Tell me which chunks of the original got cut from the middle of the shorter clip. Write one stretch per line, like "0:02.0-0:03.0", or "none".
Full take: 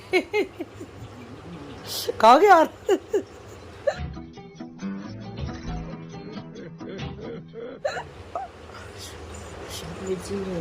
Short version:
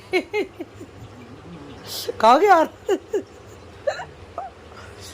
0:03.9-0:07.9